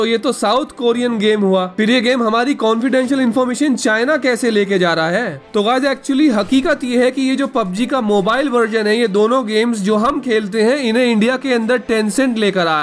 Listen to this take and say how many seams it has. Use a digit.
0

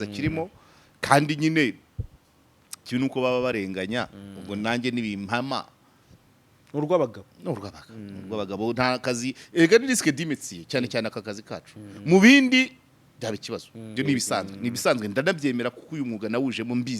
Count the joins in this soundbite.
1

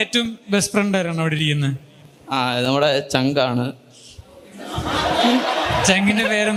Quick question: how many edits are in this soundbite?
0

